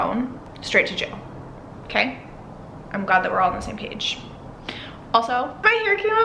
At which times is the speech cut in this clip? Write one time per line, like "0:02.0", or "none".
none